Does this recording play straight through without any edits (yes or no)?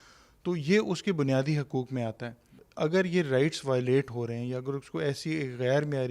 no